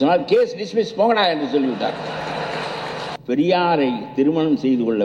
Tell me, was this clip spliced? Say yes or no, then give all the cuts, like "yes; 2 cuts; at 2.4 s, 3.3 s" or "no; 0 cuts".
yes; 1 cut; at 3.1 s